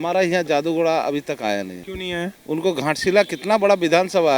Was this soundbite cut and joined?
no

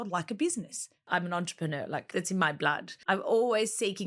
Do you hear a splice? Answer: yes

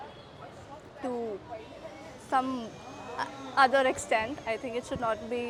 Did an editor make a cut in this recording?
no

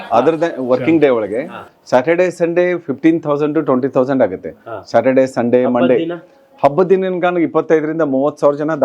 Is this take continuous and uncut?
yes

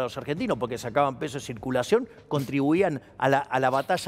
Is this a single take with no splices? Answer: yes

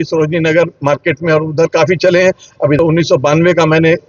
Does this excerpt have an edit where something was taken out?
yes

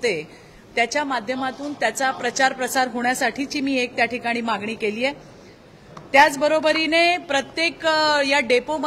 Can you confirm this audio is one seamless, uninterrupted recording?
yes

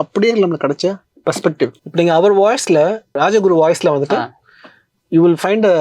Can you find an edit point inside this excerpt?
no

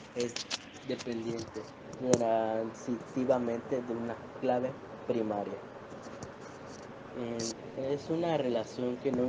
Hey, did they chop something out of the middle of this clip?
no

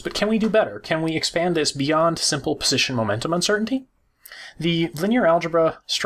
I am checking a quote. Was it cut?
no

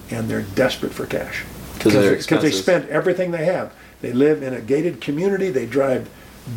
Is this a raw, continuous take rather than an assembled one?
yes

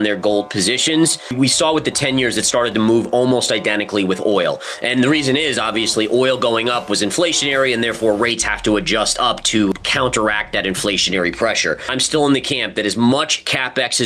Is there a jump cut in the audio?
yes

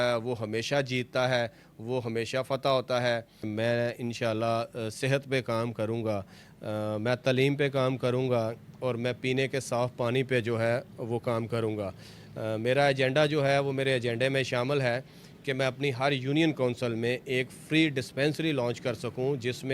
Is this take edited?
yes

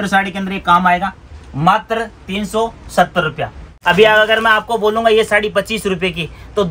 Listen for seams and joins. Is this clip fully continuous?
no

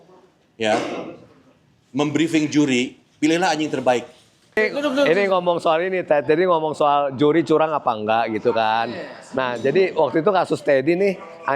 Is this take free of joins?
no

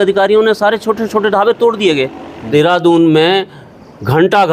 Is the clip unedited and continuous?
no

